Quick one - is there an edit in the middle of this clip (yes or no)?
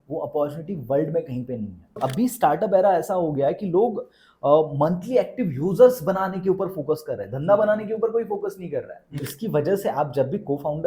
yes